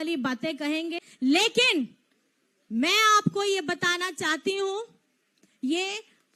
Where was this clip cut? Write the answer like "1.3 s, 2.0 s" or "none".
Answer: 1.1 s